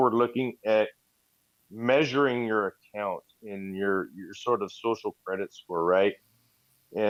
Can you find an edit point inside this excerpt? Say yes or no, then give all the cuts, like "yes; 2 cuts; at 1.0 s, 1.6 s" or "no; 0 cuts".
no; 0 cuts